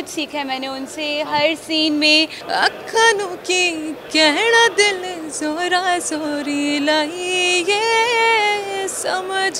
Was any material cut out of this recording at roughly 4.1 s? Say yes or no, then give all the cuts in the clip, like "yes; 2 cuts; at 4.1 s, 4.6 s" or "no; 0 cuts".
no; 1 cut; at 2.4 s